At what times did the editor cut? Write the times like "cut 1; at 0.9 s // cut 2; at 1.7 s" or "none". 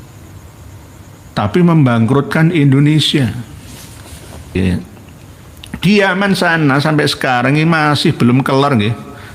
cut 1; at 4.6 s